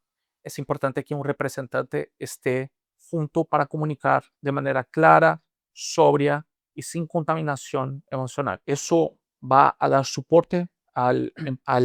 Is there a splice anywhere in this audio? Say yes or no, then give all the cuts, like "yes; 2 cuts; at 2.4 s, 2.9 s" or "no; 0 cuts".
no; 0 cuts